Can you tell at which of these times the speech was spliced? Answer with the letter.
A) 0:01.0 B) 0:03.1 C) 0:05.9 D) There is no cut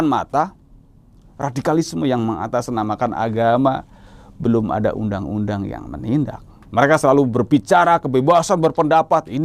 D